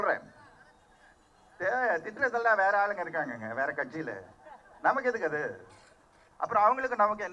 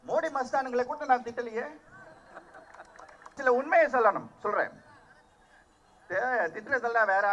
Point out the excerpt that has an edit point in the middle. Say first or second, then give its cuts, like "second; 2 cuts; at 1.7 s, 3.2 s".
second; 1 cut; at 3.4 s